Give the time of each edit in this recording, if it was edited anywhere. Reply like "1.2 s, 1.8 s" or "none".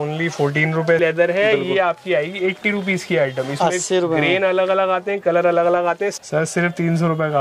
1.0 s, 6.2 s